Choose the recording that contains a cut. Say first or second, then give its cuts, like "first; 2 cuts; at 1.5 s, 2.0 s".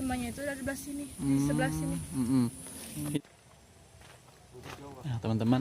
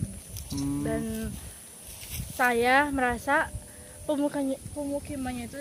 first; 1 cut; at 3.2 s